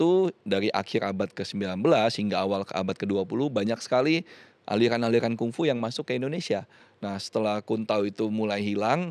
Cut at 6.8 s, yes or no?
yes